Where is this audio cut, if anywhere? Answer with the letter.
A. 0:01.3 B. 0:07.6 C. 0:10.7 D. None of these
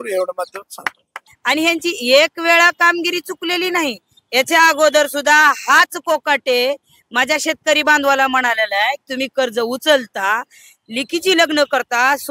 A